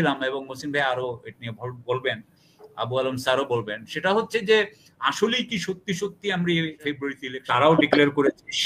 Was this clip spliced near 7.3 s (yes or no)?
yes